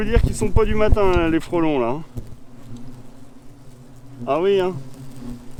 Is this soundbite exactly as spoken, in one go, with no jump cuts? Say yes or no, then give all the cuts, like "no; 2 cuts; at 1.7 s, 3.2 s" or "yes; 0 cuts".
yes; 0 cuts